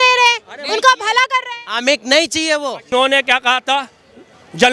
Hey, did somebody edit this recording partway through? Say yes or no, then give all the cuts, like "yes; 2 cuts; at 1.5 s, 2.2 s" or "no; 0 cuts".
yes; 1 cut; at 2.9 s